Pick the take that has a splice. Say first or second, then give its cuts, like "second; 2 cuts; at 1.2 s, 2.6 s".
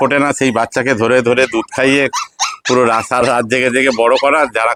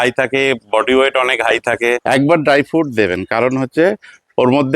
second; 1 cut; at 2.0 s